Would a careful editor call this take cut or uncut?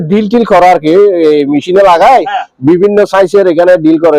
uncut